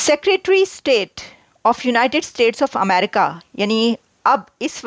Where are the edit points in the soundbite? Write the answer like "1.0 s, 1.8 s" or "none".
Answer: none